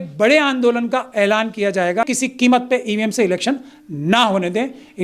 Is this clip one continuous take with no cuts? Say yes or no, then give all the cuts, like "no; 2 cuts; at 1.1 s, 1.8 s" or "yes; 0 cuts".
no; 1 cut; at 2.1 s